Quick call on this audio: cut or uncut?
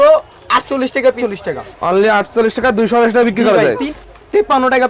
cut